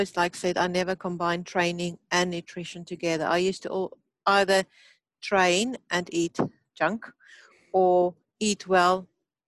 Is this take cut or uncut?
uncut